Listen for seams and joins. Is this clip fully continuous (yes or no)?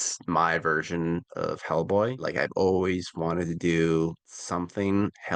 yes